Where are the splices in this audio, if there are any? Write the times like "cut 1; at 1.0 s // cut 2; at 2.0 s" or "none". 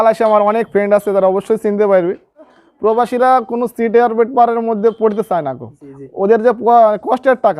cut 1; at 2.6 s